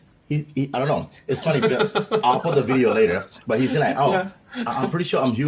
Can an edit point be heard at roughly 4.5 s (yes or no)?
yes